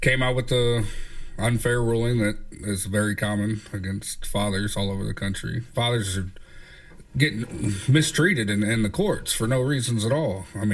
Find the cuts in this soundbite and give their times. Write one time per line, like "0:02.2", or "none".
0:05.6